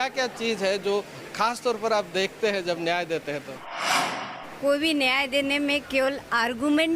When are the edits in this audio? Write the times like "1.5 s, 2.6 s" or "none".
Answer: 4.1 s